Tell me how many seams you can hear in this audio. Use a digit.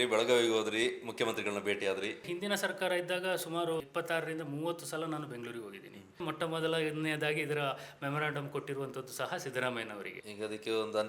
4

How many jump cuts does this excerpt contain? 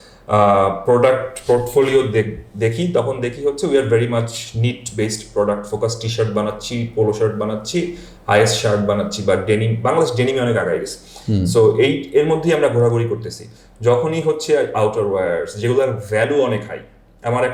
0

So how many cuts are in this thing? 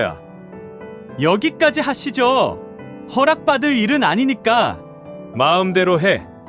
0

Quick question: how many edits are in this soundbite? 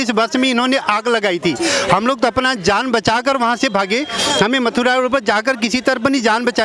0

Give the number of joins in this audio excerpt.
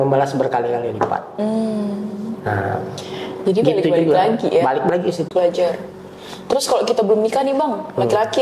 1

